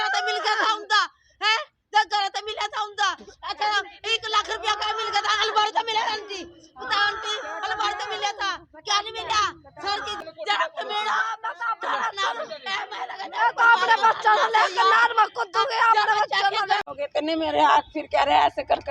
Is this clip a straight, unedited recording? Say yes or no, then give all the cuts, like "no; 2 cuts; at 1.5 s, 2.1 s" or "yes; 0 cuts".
no; 2 cuts; at 10.3 s, 16.9 s